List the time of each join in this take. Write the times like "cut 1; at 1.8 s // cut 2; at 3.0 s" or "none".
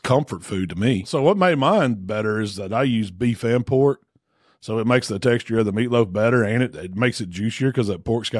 cut 1; at 1.1 s